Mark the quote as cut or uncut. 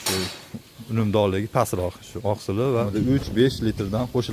cut